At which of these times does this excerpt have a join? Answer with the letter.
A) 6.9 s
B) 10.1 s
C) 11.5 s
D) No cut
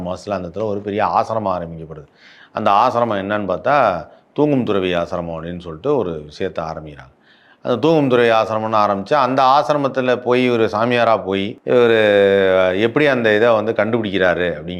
C